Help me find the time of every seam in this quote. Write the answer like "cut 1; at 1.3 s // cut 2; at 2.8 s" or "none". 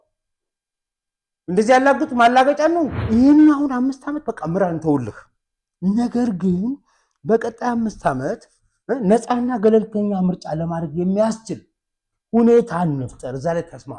cut 1; at 3.0 s